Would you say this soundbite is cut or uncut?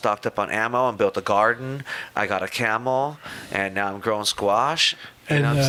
uncut